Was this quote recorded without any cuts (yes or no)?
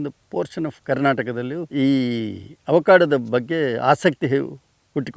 no